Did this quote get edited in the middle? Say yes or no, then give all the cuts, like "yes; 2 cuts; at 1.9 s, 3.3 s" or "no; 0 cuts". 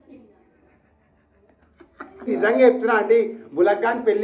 yes; 1 cut; at 2.3 s